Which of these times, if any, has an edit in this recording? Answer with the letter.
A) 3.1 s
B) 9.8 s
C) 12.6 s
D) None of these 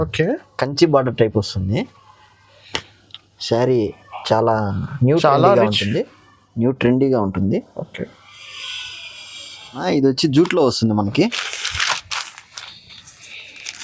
B